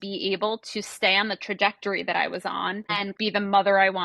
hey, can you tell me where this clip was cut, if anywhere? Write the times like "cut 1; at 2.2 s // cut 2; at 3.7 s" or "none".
cut 1; at 3.1 s